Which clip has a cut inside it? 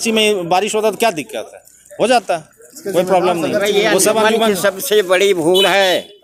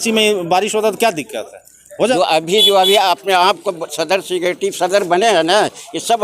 second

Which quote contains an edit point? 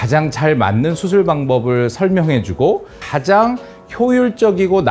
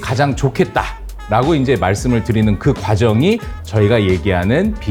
first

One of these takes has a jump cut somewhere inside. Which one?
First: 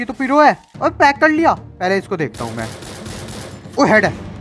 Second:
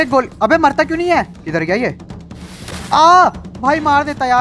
second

